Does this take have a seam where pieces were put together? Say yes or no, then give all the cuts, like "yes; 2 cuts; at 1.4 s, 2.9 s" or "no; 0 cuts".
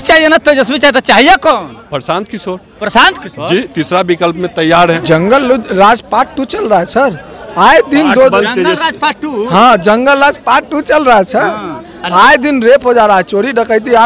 yes; 1 cut; at 5.0 s